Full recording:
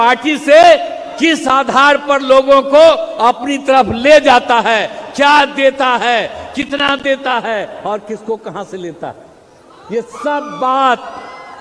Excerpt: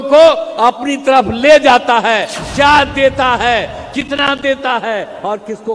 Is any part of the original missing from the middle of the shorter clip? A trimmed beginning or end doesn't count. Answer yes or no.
no